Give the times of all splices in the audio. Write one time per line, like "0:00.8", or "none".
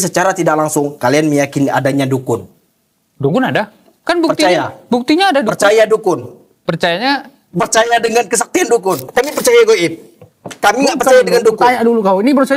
0:09.0